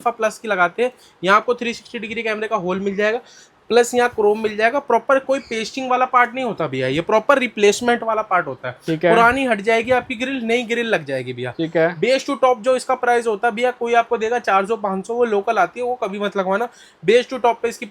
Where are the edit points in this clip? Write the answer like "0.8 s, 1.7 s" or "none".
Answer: none